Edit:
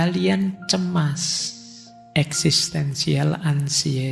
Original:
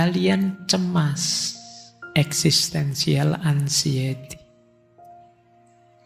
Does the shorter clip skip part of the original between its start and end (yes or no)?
no